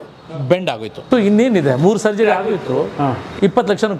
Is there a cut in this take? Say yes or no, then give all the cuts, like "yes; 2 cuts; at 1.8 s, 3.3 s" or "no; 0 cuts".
yes; 1 cut; at 0.9 s